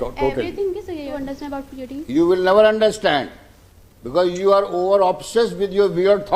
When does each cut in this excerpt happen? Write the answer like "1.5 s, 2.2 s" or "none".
1.1 s